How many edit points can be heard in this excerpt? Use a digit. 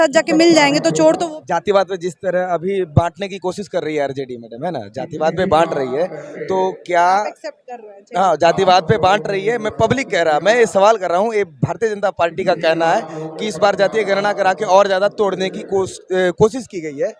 1